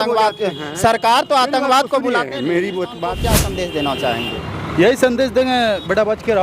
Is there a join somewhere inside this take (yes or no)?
yes